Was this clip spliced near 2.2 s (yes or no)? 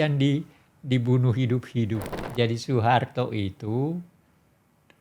yes